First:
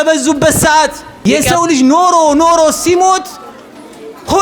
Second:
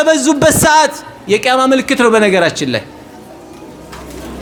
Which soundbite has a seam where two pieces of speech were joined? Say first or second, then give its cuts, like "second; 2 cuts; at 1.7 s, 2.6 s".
first; 1 cut; at 1.4 s